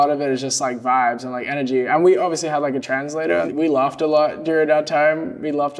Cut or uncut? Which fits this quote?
cut